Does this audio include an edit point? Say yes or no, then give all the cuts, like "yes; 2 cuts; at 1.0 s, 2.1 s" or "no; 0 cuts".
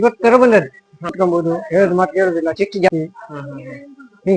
yes; 2 cuts; at 1.1 s, 2.9 s